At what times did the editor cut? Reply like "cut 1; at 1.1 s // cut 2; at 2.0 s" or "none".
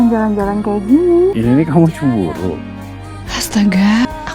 cut 1; at 1.0 s

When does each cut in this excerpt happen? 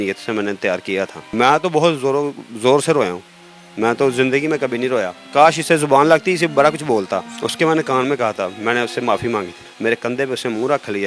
cut 1; at 1.2 s // cut 2; at 5.2 s // cut 3; at 7.4 s // cut 4; at 9.7 s

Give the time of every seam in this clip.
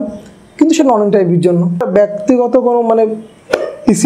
cut 1; at 1.9 s

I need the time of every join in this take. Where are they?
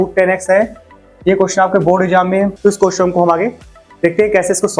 cut 1; at 2.5 s

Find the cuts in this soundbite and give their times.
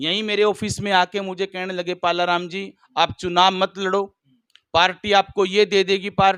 none

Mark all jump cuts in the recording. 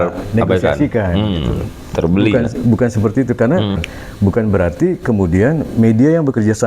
cut 1; at 3.9 s

